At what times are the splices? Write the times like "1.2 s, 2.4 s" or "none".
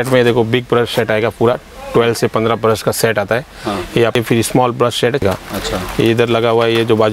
4.2 s, 5.2 s

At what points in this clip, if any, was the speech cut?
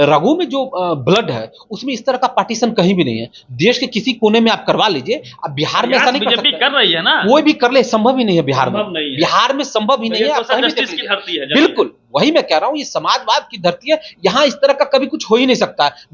none

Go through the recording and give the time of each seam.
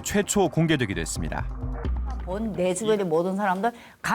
2.3 s

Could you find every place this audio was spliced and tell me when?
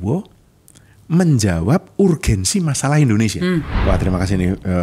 3.7 s

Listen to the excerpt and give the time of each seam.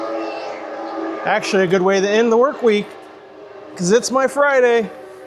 none

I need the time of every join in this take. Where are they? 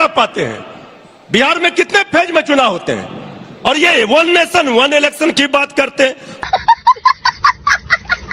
none

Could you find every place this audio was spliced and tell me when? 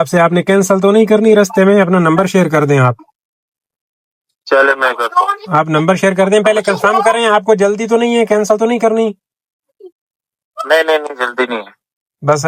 none

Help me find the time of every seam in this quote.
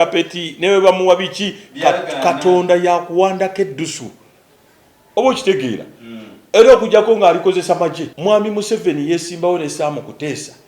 8.1 s

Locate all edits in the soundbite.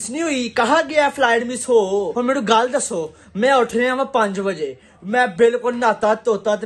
2.1 s

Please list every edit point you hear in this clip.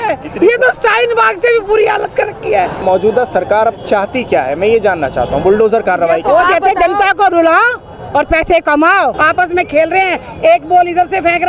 2.8 s, 9.2 s

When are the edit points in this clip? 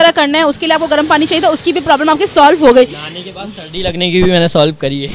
none

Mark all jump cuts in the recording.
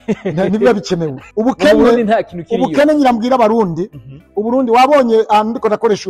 1.2 s

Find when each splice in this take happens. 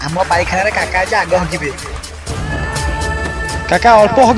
none

